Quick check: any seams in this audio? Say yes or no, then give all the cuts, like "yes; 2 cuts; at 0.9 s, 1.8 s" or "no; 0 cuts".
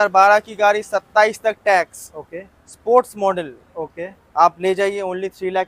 no; 0 cuts